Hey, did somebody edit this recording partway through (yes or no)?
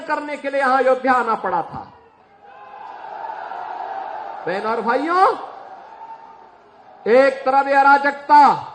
no